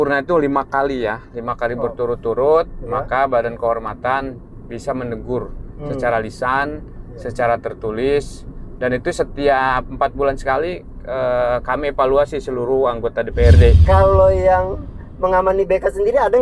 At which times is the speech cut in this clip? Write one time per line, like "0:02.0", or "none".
0:13.8